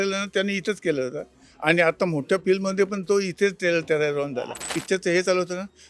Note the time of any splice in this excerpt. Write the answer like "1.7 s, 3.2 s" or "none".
4.7 s